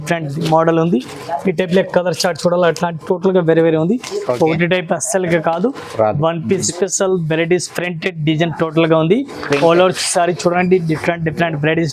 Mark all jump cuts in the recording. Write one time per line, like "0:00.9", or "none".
0:06.7

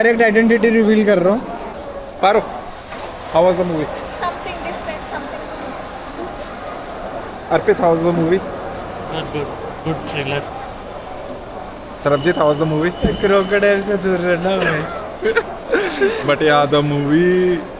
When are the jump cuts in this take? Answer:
0:01.7

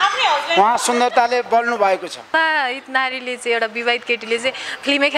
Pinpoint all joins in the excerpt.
0:02.3

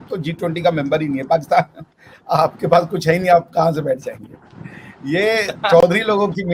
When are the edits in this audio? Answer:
none

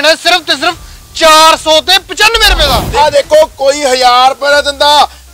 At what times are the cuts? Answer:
0:02.8

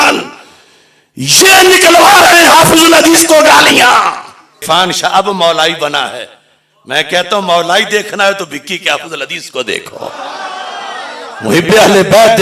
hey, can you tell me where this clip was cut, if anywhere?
0:04.6

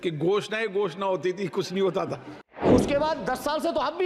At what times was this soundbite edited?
0:02.7

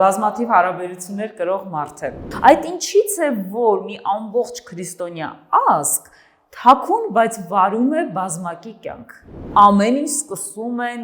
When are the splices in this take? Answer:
0:02.3
0:09.4

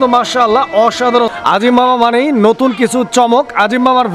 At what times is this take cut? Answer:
0:01.3

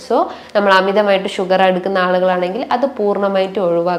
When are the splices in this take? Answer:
none

